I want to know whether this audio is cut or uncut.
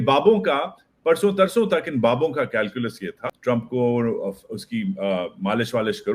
cut